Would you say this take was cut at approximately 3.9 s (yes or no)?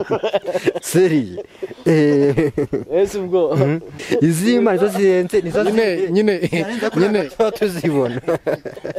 yes